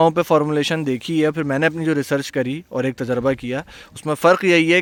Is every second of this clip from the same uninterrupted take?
yes; 0 cuts

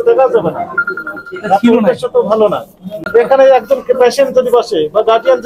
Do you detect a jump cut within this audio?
yes; 1 cut; at 3.0 s

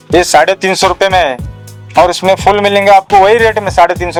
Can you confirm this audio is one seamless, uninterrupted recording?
yes; 0 cuts

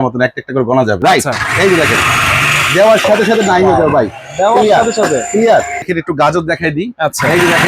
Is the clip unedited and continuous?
no; 2 cuts; at 1.0 s, 5.9 s

